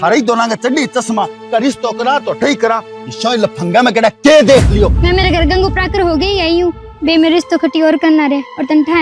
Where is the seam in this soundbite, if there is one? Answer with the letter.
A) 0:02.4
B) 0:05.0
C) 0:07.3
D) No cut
B